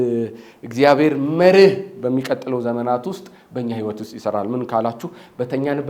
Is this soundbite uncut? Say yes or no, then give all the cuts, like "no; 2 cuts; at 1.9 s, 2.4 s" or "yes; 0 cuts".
yes; 0 cuts